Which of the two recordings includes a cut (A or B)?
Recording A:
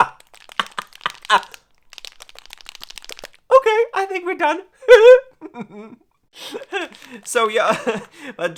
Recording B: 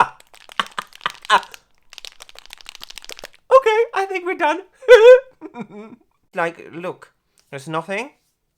B